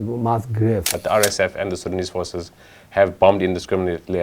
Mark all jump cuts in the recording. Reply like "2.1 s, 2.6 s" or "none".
0.9 s